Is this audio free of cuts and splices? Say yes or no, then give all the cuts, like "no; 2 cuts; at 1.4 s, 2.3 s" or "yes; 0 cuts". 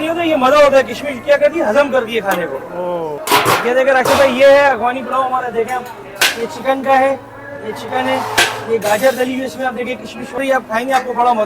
no; 2 cuts; at 3.2 s, 10.4 s